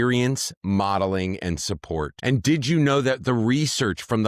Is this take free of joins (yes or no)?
no